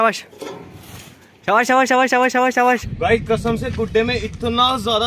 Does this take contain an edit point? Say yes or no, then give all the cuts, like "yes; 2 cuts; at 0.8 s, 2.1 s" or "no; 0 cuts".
yes; 1 cut; at 2.7 s